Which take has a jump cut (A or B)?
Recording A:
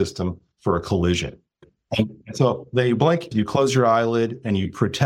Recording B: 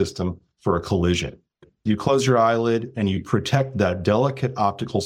B